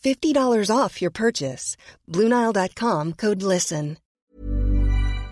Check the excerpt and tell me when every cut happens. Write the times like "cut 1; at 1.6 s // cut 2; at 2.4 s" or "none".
cut 1; at 4.2 s

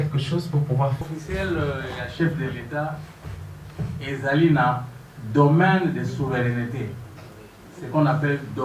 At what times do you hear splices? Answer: cut 1; at 1.0 s

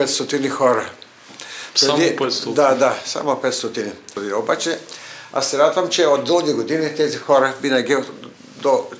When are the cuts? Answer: cut 1; at 4.1 s

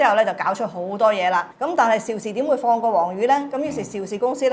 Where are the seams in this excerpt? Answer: cut 1; at 1.5 s

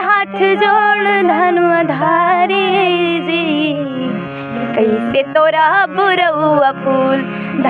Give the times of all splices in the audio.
none

